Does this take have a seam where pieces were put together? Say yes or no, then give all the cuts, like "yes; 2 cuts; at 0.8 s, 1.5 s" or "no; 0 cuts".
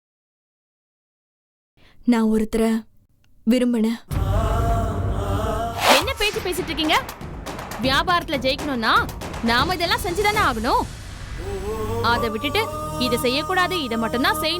yes; 1 cut; at 5.8 s